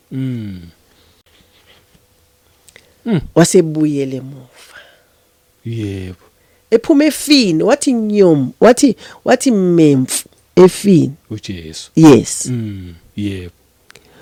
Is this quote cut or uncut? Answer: uncut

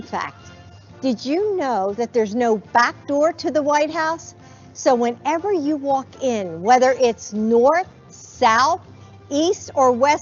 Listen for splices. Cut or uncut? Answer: uncut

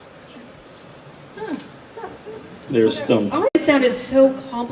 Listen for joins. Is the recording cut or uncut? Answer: uncut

